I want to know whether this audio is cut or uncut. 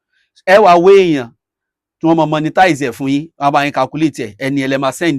uncut